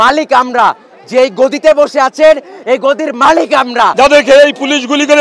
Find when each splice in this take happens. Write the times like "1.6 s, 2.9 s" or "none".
3.9 s